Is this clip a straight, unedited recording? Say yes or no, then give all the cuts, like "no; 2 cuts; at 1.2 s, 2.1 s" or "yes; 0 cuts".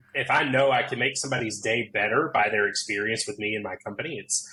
yes; 0 cuts